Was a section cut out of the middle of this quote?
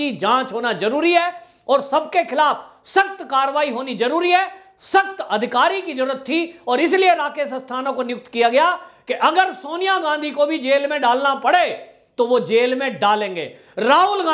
no; 0 cuts

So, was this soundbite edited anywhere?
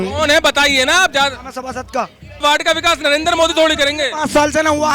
yes; 1 cut; at 2.4 s

